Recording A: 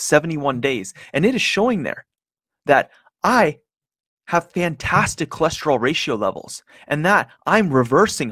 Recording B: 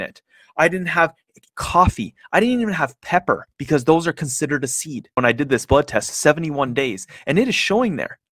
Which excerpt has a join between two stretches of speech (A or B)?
B